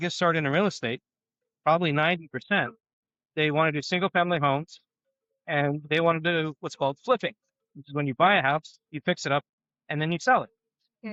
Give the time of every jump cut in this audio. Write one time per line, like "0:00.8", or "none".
none